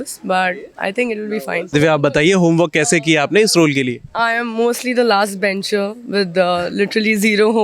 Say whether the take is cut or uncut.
cut